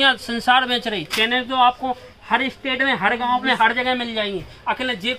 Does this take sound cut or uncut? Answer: uncut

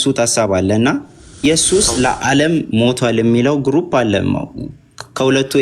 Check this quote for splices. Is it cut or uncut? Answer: cut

